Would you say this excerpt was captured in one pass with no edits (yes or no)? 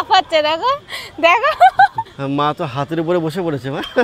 no